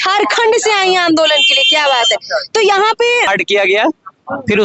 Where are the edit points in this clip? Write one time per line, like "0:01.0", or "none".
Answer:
0:03.3